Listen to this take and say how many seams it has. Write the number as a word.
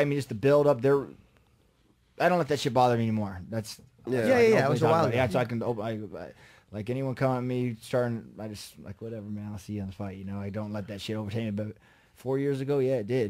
one